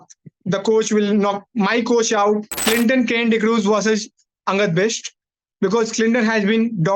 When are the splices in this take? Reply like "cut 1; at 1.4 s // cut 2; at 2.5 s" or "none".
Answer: cut 1; at 2.5 s

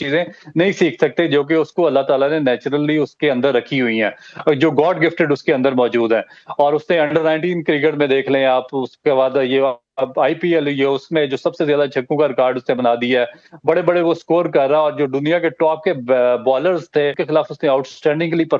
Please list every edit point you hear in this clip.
cut 1; at 17.2 s

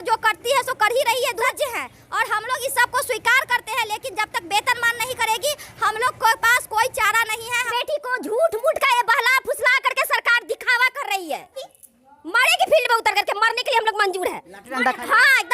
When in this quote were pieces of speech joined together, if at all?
cut 1; at 1.4 s // cut 2; at 7.6 s // cut 3; at 11.8 s

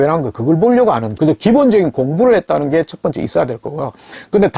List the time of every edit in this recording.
cut 1; at 1.1 s

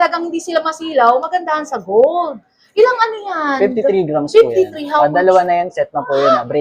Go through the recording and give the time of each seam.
none

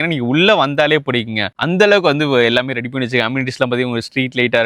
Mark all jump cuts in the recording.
none

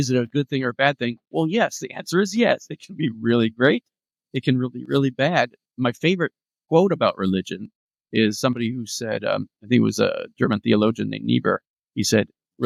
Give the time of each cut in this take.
none

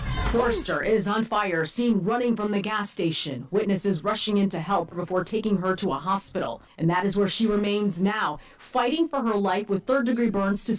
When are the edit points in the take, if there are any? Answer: cut 1; at 1.0 s

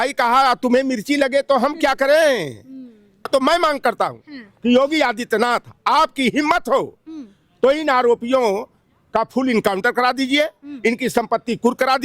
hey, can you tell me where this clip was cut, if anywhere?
cut 1; at 3.2 s

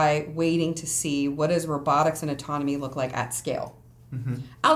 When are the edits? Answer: none

